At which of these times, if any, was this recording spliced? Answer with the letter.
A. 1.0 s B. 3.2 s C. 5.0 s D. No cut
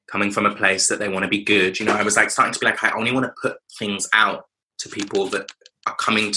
D